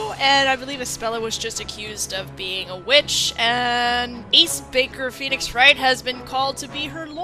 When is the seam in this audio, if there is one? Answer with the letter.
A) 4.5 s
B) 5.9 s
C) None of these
B